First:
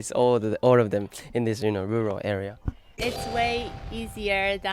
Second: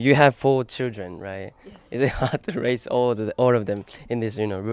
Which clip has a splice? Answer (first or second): first